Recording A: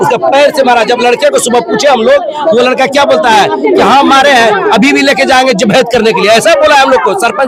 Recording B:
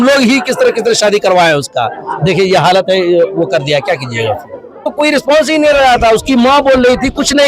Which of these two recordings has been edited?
B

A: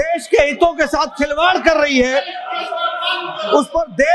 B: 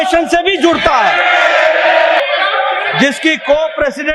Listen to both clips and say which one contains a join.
B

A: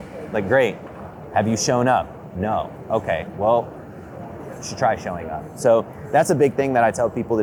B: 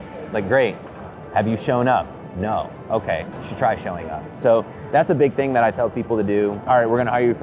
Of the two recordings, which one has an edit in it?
B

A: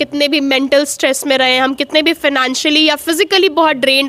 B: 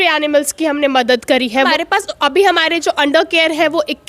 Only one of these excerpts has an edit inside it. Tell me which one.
B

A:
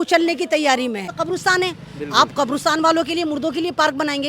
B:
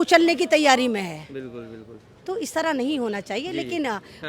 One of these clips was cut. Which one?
A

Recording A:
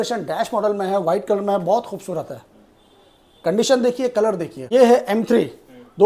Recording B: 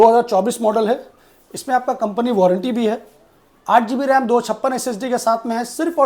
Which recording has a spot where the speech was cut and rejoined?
A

